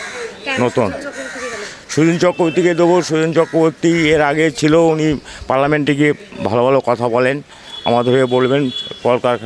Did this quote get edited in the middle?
no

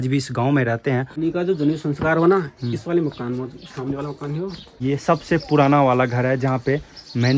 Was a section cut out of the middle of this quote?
yes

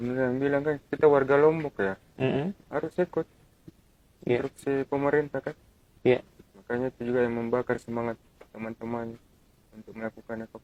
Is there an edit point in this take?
no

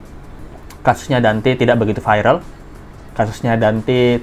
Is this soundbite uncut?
yes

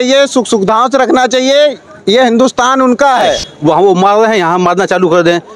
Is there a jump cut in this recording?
yes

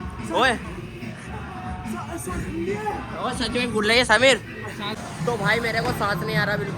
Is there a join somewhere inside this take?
yes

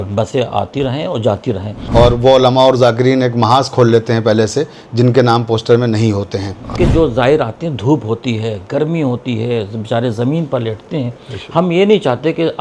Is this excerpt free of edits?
no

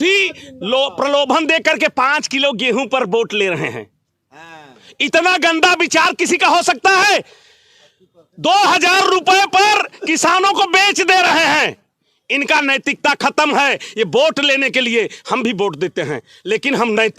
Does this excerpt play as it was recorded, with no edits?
yes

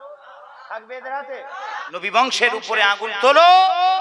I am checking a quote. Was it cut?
yes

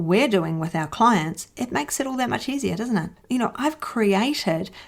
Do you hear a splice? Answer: yes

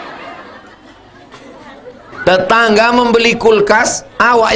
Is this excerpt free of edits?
no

